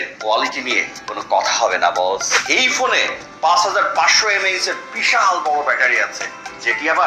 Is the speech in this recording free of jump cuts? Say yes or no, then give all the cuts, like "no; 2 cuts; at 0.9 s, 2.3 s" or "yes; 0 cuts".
yes; 0 cuts